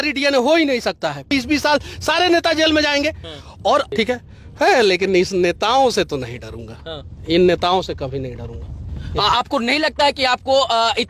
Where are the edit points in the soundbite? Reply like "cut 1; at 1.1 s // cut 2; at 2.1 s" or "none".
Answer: cut 1; at 1.3 s // cut 2; at 3.9 s